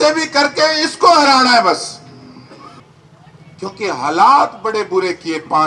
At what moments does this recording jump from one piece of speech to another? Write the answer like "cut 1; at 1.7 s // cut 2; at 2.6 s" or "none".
cut 1; at 2.8 s